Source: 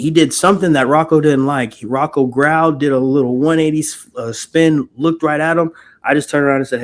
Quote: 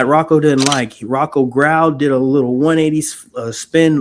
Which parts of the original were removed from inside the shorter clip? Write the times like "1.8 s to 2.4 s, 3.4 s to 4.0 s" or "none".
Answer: none